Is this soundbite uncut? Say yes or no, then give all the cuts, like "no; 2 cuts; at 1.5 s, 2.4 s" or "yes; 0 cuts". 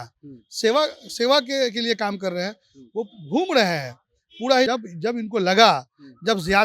no; 1 cut; at 4.7 s